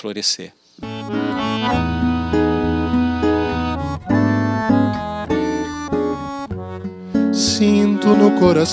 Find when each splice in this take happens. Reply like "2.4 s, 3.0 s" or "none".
0.9 s